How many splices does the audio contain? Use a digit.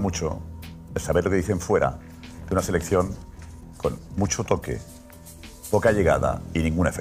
0